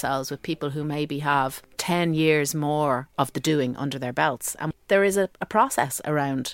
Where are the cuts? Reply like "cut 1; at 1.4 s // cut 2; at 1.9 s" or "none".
cut 1; at 1.7 s // cut 2; at 4.7 s